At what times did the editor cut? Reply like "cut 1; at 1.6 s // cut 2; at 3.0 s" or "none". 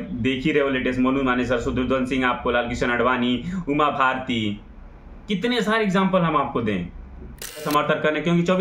cut 1; at 7.7 s

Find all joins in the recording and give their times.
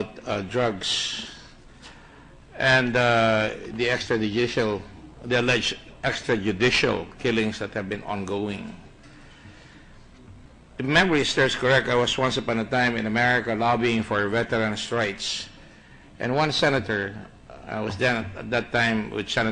cut 1; at 12.4 s

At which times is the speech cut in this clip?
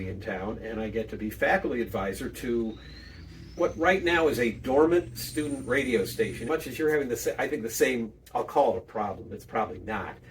cut 1; at 6.4 s

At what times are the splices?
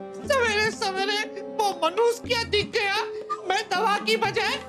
none

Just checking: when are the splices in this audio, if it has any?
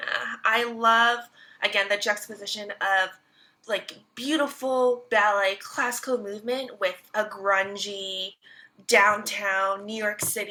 none

